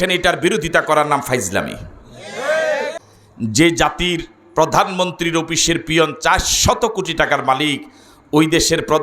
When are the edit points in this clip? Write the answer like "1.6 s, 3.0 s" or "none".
3.1 s

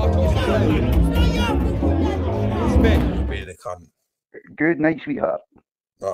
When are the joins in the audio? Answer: 3.2 s

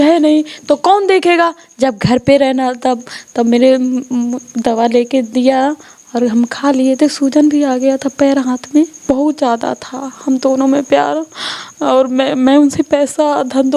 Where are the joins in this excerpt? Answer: 9.0 s

